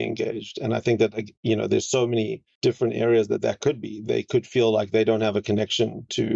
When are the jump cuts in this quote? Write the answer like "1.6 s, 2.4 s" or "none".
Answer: 2.4 s